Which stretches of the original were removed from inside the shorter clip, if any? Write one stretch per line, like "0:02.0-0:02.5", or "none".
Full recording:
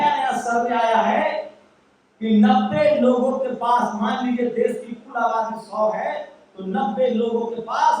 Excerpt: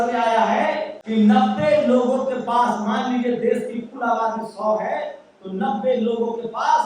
0:01.5-0:02.1